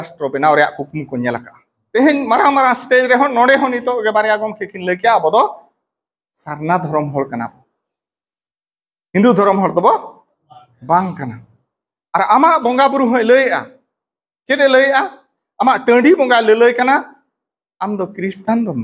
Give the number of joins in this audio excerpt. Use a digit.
1